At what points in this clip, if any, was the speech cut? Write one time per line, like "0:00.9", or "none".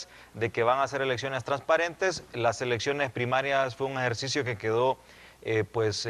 none

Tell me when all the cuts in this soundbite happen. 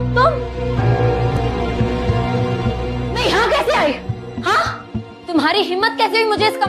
0:01.3

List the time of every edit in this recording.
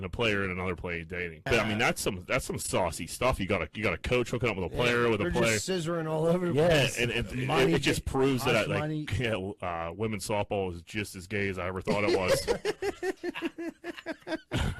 0:01.5

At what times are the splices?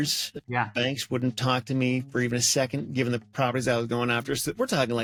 none

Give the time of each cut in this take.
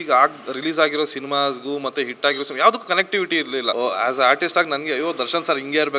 0:03.7

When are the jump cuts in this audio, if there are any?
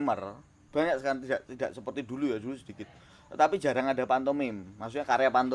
none

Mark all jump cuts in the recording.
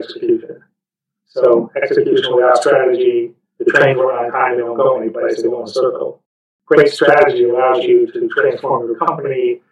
0:03.4

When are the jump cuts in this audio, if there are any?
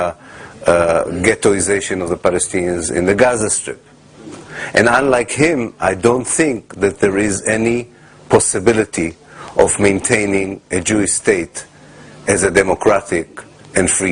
none

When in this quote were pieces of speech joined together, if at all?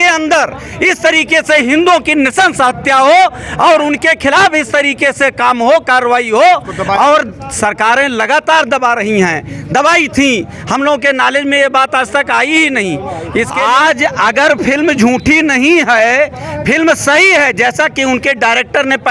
0:13.5

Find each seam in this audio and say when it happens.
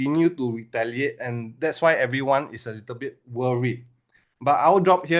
none

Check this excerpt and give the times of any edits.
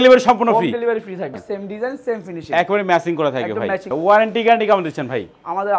0:01.4
0:03.9

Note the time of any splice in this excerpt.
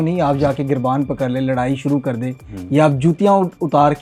none

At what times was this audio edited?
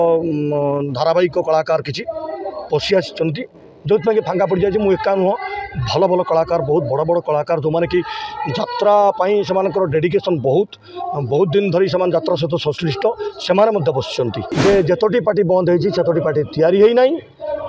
0:14.4

